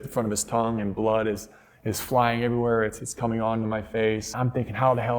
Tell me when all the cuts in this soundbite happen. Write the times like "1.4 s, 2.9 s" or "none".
4.3 s